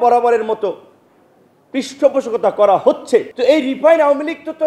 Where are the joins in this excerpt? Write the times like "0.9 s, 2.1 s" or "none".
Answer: 3.3 s